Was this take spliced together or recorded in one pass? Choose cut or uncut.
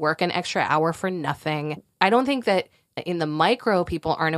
cut